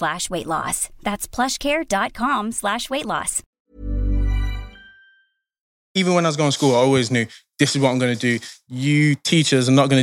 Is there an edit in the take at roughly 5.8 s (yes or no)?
yes